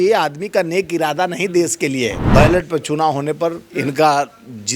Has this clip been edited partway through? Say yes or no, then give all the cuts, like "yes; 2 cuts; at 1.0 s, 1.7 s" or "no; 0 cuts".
yes; 1 cut; at 2.2 s